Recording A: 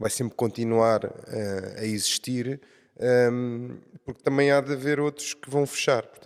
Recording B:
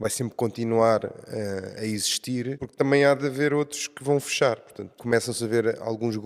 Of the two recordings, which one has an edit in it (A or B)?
B